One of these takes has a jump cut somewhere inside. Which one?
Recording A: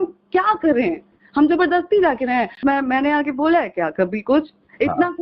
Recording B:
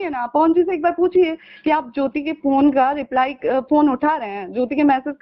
A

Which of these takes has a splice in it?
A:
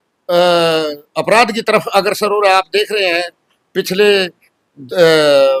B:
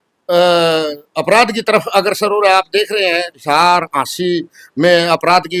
B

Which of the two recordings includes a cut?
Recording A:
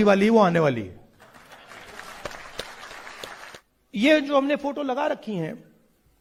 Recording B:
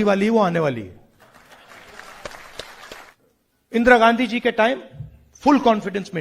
B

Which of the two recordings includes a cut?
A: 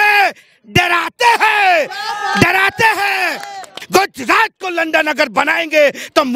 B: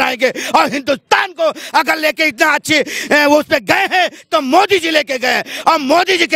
A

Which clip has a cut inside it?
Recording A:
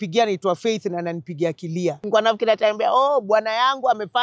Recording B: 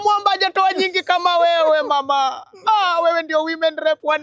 A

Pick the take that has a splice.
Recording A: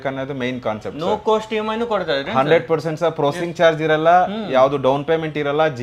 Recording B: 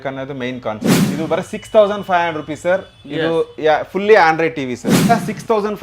B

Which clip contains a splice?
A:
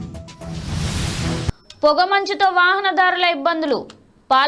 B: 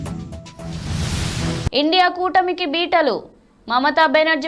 A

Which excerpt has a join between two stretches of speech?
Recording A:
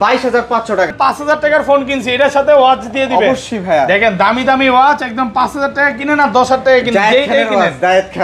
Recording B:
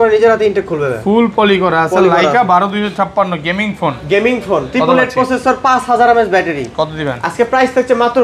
A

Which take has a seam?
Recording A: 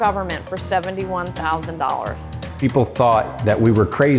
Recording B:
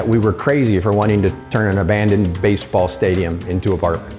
A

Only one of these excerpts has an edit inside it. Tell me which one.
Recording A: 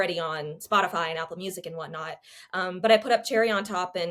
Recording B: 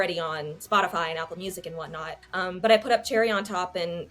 B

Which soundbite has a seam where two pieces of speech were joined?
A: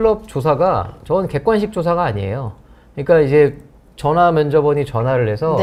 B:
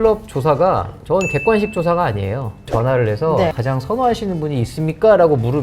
B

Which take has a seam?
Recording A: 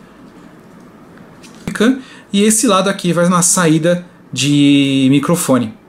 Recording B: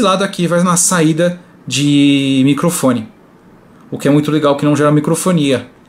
A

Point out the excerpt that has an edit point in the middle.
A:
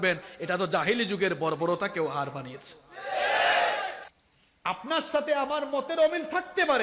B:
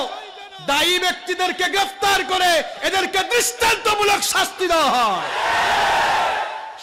A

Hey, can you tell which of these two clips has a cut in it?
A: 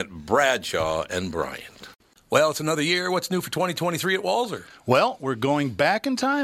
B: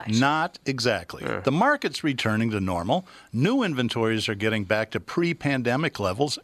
A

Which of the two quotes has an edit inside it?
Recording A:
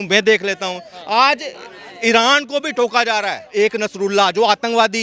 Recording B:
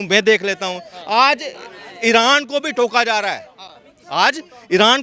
A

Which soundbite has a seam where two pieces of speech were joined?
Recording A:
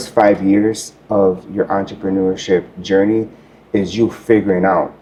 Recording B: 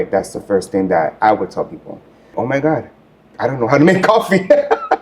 B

